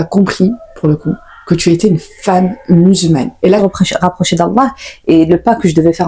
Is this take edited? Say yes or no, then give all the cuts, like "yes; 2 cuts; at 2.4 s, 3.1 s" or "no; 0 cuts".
yes; 2 cuts; at 3.6 s, 4.9 s